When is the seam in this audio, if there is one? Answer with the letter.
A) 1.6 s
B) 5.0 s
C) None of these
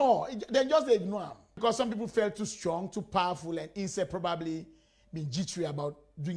A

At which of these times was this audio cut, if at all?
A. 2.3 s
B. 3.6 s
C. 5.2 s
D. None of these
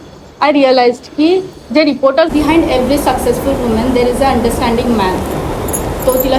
A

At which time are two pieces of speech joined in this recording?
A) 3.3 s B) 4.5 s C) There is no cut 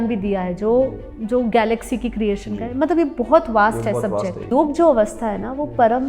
B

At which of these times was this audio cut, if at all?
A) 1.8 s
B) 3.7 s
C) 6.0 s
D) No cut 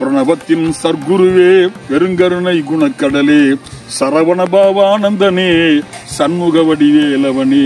A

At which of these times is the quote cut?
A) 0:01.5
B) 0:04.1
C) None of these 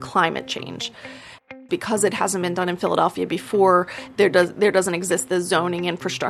A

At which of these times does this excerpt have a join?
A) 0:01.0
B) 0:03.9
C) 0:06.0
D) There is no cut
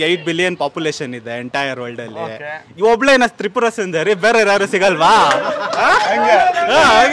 C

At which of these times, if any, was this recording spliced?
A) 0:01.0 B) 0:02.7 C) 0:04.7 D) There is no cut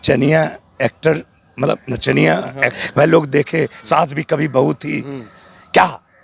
B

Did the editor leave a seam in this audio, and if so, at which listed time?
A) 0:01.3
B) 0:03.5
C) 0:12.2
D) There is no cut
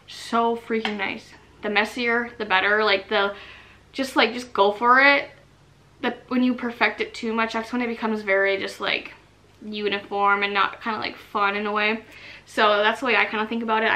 A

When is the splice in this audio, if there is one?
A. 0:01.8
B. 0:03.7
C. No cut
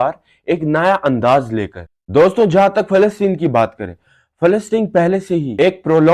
A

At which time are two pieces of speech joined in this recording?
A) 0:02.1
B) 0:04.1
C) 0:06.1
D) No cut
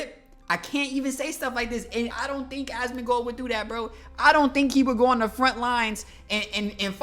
A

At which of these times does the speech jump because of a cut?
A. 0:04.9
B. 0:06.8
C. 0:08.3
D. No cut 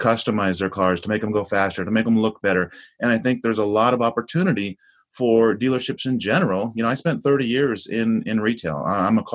D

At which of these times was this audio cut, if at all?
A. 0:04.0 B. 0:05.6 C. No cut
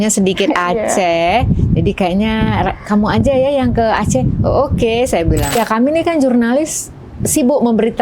B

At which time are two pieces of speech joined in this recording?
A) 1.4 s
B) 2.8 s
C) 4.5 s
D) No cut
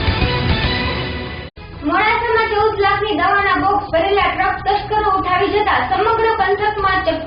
A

